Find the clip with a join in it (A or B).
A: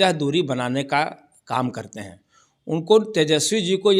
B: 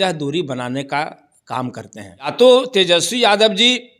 B